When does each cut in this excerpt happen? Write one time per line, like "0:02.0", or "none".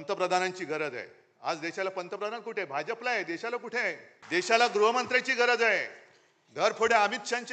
0:04.1